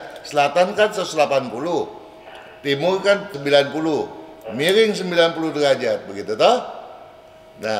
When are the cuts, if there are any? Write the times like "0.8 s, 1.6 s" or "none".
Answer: 3.4 s